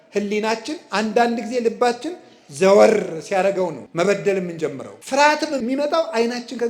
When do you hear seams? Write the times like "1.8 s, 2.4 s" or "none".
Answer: 3.8 s, 4.9 s, 5.6 s